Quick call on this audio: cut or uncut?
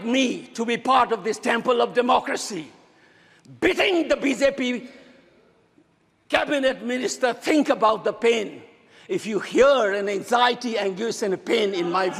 uncut